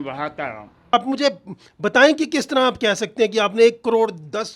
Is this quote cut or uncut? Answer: cut